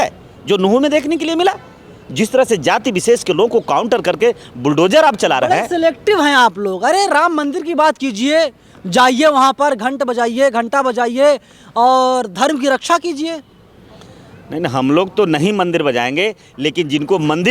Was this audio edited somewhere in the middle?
no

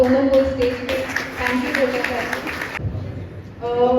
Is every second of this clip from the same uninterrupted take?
no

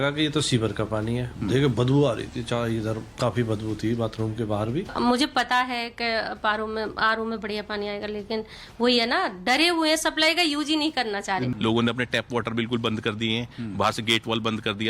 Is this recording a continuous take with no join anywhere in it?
no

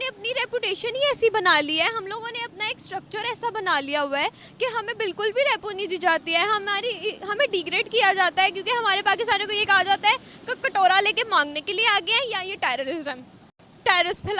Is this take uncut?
yes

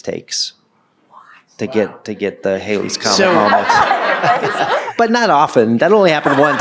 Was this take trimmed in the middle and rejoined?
yes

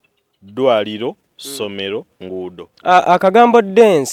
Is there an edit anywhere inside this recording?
no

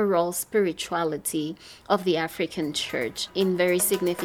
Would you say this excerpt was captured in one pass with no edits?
no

